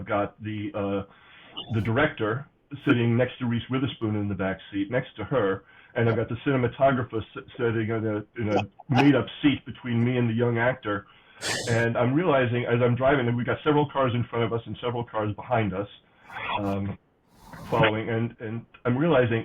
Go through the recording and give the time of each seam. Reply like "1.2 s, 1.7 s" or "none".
none